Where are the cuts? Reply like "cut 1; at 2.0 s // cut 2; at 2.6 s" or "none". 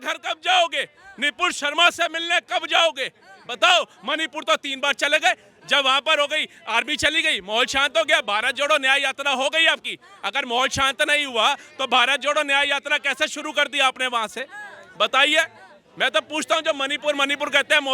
none